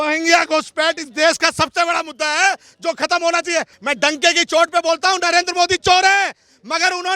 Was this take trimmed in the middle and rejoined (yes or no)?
yes